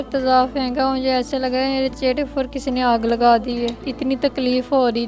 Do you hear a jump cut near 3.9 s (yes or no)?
yes